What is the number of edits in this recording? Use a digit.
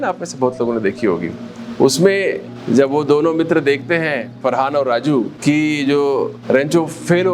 4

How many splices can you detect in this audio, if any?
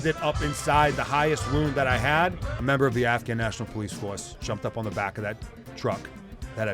1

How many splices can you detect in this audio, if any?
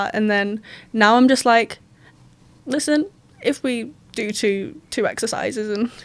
0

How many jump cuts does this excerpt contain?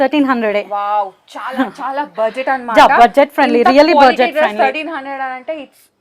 0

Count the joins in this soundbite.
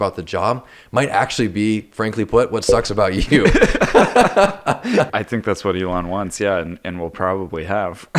1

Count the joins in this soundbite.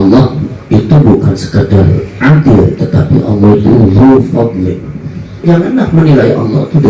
1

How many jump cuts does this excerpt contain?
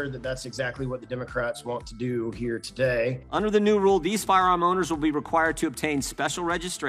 1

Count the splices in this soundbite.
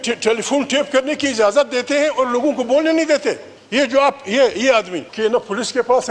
2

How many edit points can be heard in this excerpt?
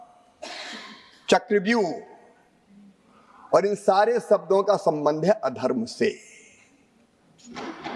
0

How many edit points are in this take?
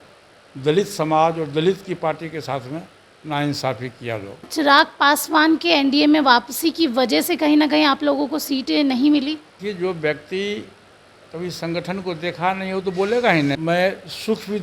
3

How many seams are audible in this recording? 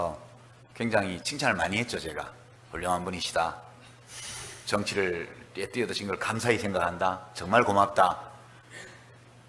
0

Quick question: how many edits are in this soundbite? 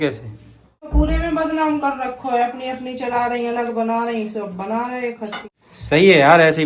2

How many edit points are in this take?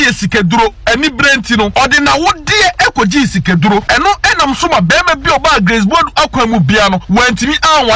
3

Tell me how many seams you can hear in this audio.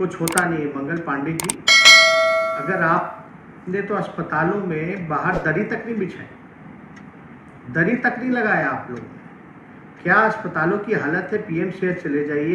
2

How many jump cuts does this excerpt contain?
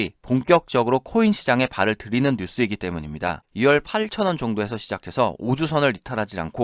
1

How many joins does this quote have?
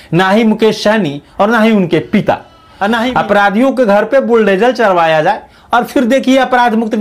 1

